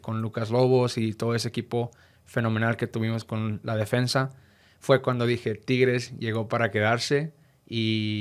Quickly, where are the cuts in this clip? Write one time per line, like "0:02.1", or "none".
none

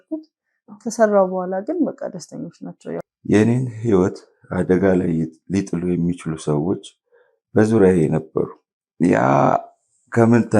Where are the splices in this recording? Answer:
0:03.1

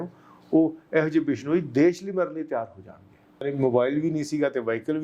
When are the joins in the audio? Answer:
0:03.4

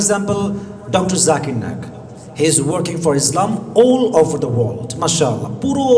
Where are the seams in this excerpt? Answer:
none

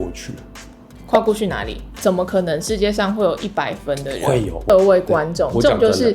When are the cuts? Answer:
0:04.7

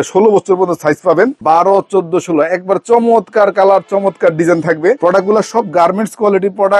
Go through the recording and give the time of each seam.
none

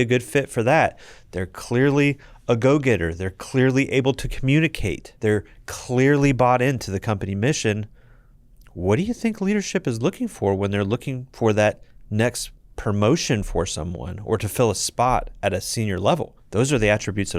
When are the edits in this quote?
0:05.1
0:16.4

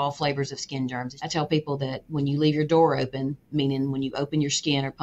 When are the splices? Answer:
0:01.1

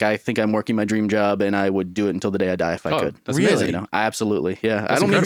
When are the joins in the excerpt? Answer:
none

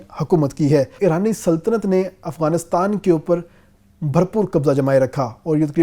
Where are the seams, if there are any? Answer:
0:00.9

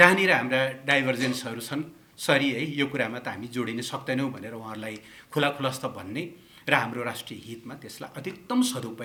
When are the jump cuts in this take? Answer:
none

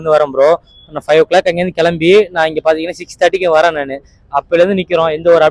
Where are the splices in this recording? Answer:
none

